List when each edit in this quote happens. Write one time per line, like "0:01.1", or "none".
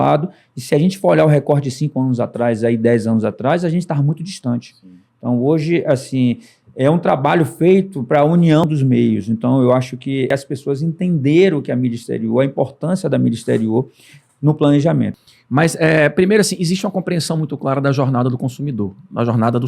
0:08.6
0:10.3
0:15.2